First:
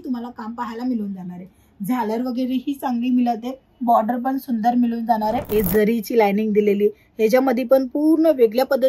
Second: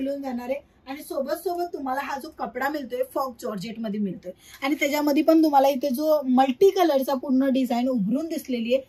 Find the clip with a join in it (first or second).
first